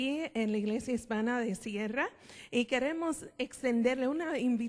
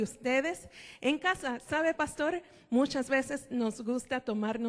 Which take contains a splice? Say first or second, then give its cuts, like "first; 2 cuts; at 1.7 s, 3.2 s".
first; 1 cut; at 2.6 s